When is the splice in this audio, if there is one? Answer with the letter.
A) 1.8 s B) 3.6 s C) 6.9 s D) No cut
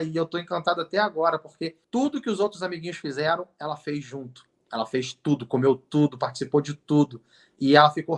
A